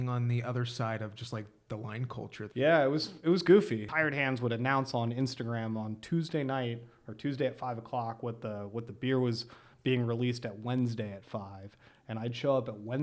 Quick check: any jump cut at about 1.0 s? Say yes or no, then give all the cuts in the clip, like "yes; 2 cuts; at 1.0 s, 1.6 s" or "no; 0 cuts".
no; 2 cuts; at 2.4 s, 3.8 s